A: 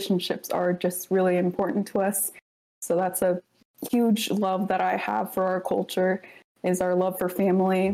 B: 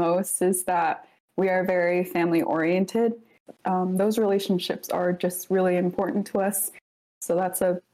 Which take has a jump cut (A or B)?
B